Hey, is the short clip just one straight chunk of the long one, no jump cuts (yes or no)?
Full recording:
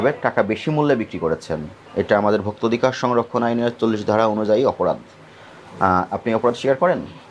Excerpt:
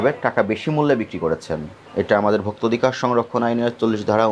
yes